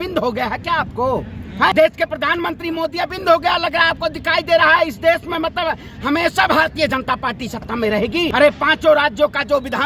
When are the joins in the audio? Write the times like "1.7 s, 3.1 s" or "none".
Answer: 1.7 s, 8.3 s